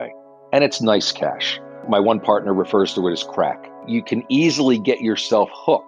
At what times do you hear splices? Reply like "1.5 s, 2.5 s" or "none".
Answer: 1.8 s, 3.8 s

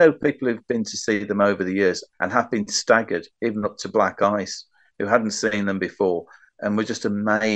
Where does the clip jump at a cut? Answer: 2.1 s

